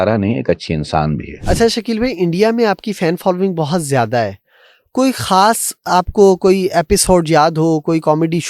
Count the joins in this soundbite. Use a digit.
1